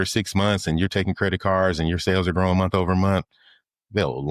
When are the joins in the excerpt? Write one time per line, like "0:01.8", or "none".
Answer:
none